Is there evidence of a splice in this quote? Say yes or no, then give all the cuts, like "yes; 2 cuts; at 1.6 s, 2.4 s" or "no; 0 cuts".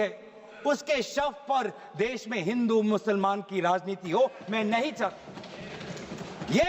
no; 0 cuts